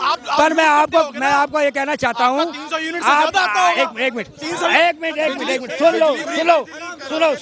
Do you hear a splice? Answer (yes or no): no